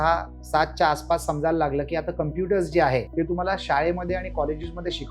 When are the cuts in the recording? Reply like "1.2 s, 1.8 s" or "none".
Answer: 3.1 s